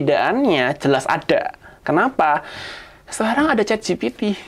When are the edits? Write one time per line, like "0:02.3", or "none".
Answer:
none